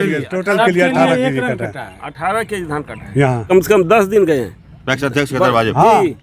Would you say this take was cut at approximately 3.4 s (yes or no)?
yes